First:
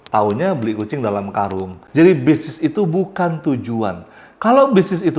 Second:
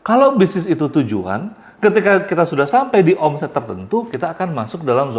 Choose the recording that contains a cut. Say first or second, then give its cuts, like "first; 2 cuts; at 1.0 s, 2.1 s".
first; 1 cut; at 1.8 s